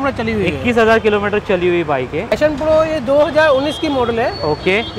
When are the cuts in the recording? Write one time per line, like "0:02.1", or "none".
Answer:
0:02.3

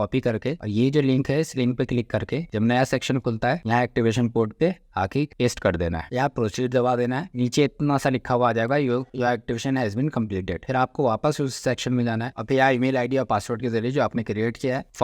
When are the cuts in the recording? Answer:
none

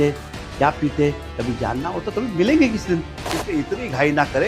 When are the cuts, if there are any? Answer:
0:03.3

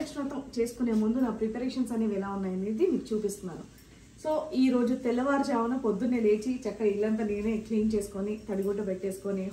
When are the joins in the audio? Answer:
none

